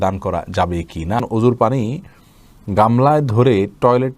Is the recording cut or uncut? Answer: cut